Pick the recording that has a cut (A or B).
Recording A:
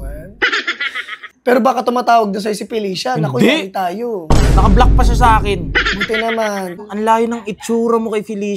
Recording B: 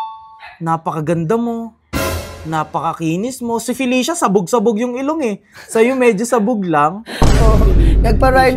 A